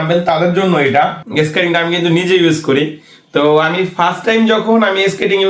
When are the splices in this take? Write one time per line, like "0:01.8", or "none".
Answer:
0:01.2